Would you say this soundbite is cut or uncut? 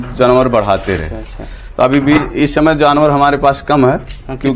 uncut